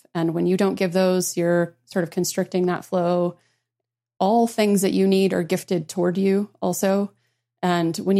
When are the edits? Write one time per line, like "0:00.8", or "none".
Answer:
0:03.7

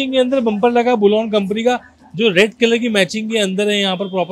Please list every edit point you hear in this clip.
none

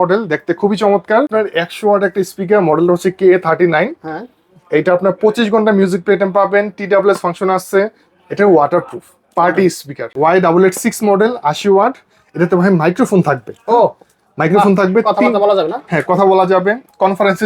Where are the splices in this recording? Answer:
0:01.3
0:10.1

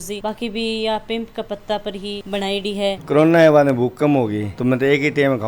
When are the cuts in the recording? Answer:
0:03.0

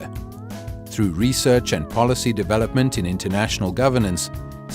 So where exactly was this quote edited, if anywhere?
0:01.5

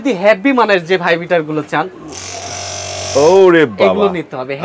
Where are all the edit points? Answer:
none

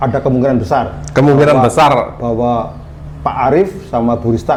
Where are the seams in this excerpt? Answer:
none

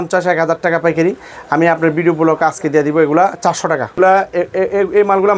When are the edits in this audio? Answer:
0:04.0

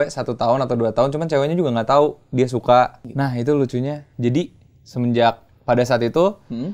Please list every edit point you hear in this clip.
0:03.1

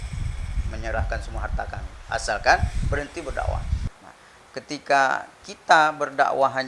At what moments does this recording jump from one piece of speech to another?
0:03.9

